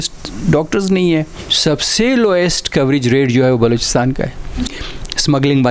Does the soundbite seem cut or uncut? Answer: cut